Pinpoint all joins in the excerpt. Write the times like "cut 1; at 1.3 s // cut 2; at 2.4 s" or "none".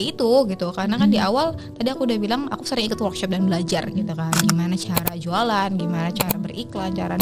none